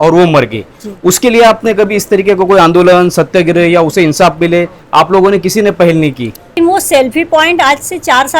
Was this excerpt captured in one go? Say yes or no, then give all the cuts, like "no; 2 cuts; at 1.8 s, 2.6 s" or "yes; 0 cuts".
no; 1 cut; at 6.5 s